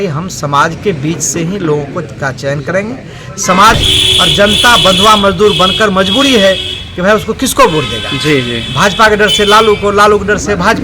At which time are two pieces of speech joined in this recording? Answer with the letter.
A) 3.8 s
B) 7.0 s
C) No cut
A